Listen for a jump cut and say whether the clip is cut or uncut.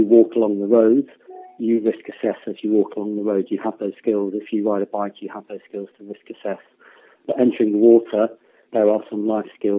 uncut